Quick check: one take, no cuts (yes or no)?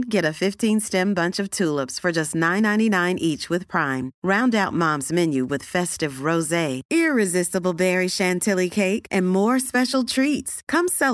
yes